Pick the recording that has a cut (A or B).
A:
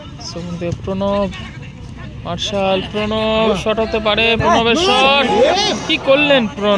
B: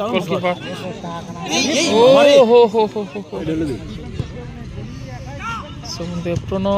B